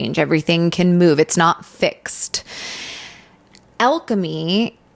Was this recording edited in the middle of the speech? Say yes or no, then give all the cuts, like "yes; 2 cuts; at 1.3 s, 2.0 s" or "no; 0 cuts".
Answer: no; 0 cuts